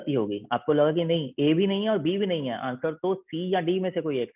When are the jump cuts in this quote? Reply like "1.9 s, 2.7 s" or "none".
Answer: none

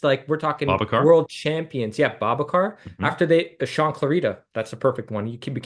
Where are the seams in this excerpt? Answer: none

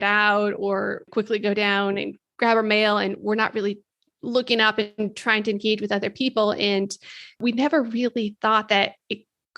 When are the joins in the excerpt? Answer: 1.1 s, 7.4 s

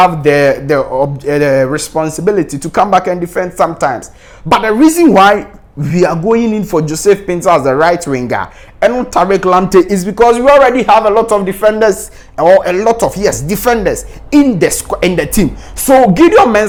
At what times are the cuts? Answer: none

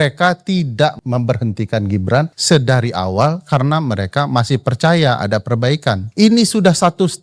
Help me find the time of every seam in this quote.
1.0 s, 2.4 s, 6.1 s

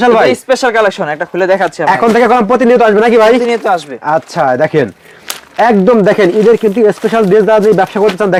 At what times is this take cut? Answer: none

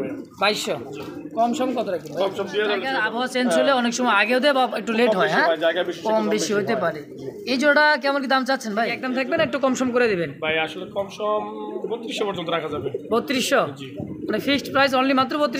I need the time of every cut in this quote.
3.2 s, 9.3 s

